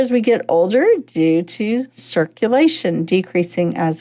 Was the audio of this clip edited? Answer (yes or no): no